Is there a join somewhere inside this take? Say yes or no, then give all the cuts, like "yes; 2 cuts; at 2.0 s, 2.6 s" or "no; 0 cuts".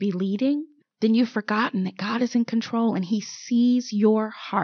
no; 0 cuts